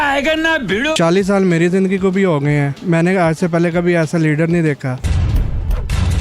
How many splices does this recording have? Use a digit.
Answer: 2